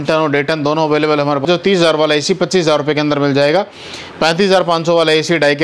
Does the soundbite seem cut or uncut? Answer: cut